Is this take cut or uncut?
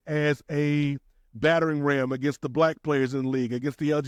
uncut